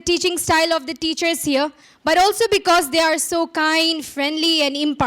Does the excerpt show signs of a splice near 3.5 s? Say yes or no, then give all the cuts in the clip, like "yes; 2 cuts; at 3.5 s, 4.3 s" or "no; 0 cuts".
no; 1 cut; at 1.9 s